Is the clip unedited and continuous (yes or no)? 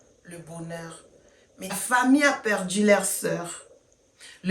no